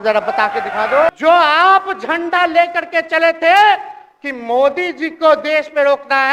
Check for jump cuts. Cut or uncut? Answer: cut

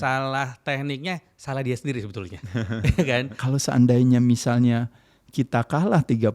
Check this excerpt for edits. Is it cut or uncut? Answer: cut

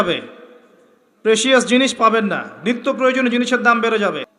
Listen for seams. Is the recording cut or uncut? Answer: uncut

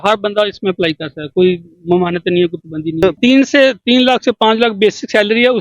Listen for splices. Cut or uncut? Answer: cut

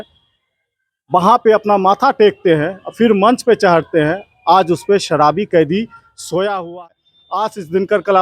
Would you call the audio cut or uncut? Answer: cut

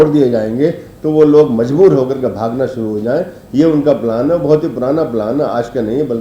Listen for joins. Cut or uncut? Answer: uncut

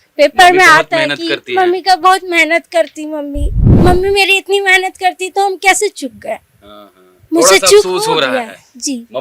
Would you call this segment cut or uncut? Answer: cut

